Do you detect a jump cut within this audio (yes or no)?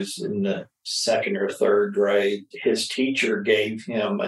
yes